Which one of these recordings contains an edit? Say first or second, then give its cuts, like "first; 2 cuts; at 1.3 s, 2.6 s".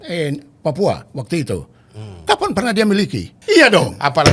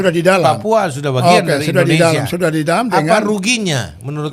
first; 1 cut; at 3.4 s